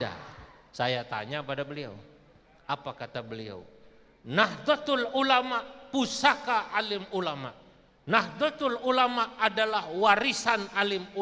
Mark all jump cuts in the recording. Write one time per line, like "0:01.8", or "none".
none